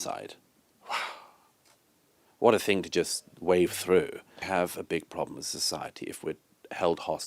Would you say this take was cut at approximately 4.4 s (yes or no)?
yes